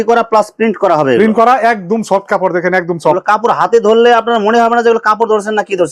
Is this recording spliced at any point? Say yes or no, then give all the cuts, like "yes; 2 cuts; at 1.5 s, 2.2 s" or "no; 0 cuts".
no; 0 cuts